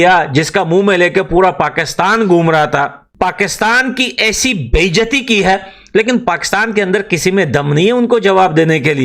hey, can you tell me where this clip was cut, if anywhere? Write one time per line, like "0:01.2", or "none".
0:03.0